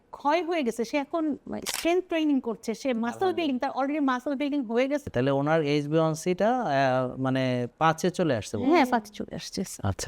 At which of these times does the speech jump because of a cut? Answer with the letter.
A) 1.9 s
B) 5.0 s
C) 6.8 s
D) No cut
B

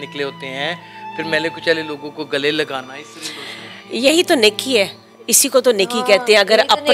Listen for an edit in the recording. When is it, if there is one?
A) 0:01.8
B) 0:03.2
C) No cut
C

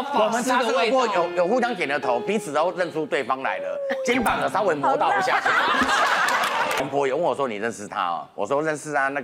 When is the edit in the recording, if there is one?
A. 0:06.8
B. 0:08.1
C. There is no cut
A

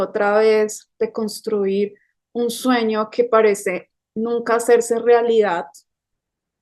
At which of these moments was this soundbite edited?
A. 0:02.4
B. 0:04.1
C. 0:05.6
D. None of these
D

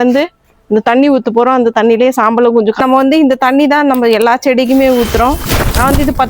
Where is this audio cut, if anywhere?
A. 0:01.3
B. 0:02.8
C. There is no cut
B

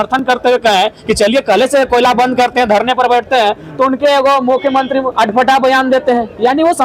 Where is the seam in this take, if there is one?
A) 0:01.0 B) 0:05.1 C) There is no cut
B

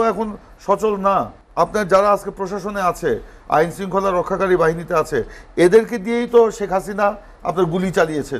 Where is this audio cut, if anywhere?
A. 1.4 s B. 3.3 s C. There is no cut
A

